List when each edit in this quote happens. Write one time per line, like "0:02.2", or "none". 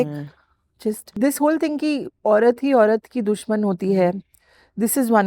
0:01.1